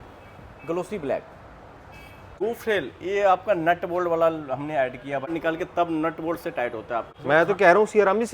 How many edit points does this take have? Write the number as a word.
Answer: three